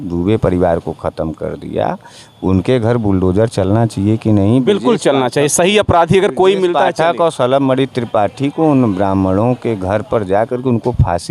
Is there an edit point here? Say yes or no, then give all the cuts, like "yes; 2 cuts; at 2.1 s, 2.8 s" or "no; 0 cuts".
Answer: no; 0 cuts